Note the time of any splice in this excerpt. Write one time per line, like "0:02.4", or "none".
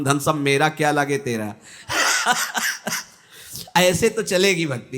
none